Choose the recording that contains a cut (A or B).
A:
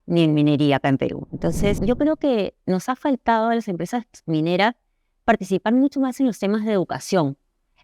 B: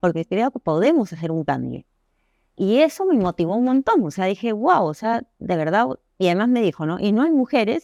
A